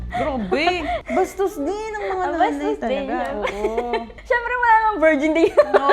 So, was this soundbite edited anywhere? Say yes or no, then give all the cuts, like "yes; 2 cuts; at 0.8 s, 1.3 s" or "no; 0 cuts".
yes; 2 cuts; at 1.0 s, 4.1 s